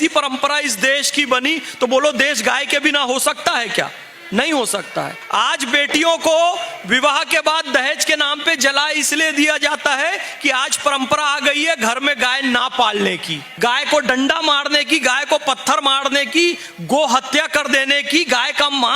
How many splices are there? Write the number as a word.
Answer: zero